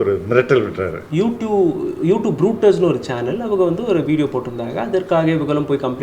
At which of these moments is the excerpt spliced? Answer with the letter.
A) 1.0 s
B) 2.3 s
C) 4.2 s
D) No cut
A